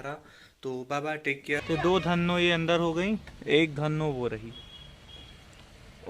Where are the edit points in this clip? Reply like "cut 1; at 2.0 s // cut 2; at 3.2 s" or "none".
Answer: cut 1; at 1.6 s